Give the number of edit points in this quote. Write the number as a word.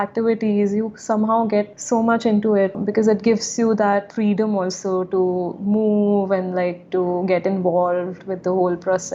two